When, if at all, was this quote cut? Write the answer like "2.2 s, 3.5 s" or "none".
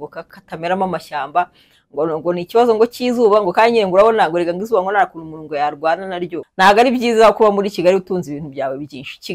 6.5 s